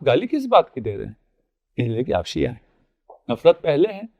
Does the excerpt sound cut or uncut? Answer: uncut